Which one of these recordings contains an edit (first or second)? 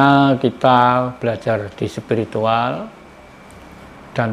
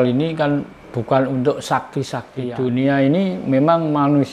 second